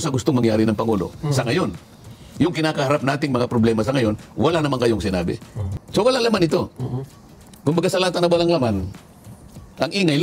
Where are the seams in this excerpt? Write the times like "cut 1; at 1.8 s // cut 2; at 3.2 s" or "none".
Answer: cut 1; at 5.5 s

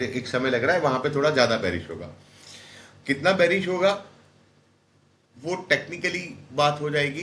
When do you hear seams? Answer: none

